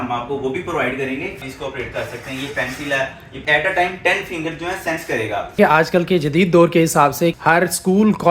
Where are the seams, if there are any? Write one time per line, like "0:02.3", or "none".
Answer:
0:01.5
0:03.4
0:05.6
0:07.3